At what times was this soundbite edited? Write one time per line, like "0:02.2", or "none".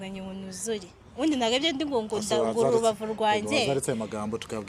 none